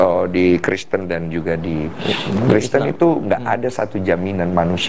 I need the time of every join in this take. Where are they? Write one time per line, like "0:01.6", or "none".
0:01.8

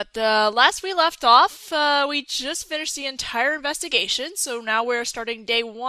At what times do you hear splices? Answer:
0:04.4

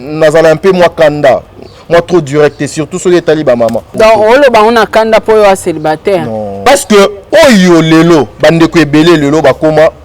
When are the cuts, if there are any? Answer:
0:03.9
0:06.5
0:07.2

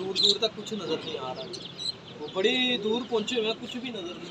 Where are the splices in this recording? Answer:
none

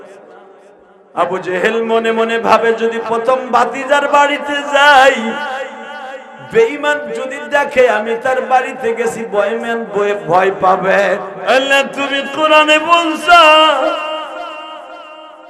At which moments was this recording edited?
0:11.3

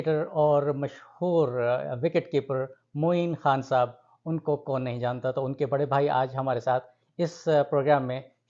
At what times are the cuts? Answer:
none

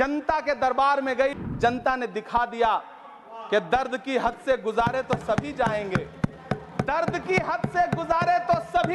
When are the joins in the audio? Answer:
0:01.3

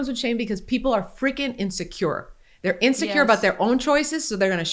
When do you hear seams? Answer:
none

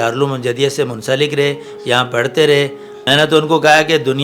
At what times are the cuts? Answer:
0:02.9

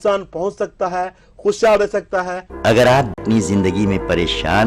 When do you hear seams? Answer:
0:02.3
0:03.2

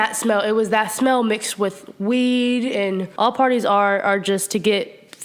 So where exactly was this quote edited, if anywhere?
0:03.1

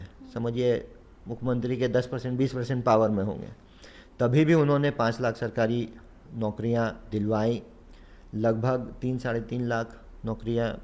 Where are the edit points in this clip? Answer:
none

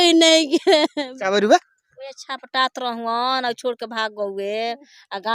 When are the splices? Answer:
0:01.1

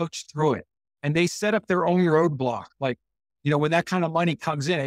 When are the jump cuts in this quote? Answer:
none

